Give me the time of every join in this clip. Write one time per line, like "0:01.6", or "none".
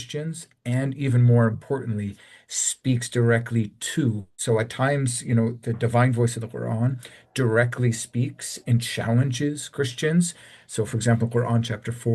none